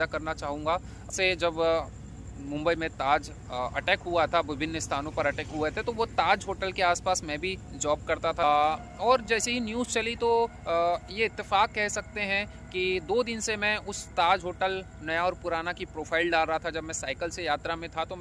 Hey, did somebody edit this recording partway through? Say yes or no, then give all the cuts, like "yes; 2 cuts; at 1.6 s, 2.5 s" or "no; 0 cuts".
yes; 2 cuts; at 1.1 s, 8.4 s